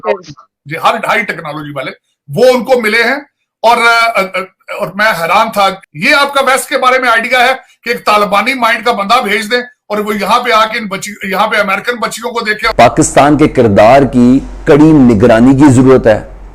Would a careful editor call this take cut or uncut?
cut